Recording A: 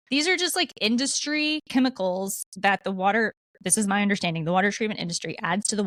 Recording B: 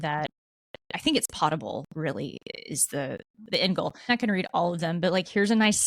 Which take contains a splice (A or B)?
B